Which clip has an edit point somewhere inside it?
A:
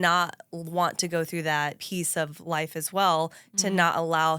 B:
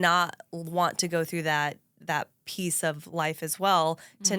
A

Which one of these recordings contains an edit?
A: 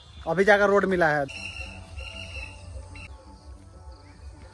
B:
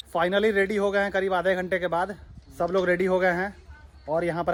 A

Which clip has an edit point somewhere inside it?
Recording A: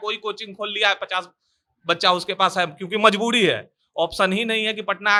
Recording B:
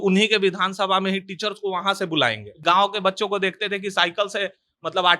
B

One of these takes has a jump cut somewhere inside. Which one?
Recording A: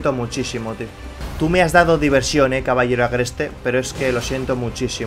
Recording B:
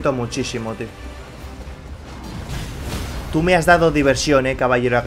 A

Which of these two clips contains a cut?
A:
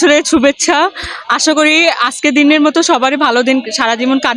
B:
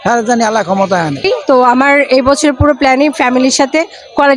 B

